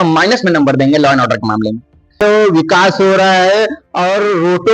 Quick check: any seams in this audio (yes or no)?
yes